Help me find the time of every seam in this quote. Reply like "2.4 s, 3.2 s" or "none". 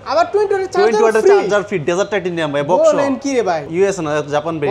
3.7 s